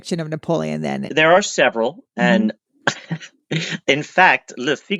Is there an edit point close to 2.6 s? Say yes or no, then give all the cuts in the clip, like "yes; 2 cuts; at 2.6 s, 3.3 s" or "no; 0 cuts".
no; 1 cut; at 1.1 s